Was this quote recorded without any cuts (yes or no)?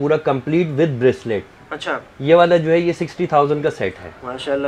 yes